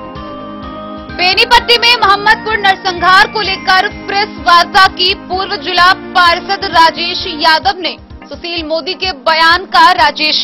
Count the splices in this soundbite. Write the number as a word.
one